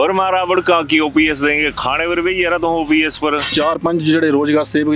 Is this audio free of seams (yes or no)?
no